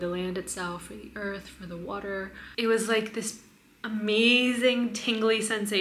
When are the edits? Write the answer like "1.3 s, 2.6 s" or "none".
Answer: 2.4 s